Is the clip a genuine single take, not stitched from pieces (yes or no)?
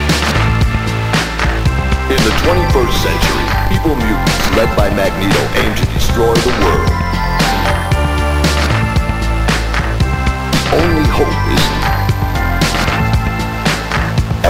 yes